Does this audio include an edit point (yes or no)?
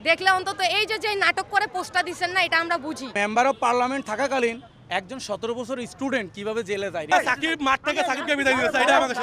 yes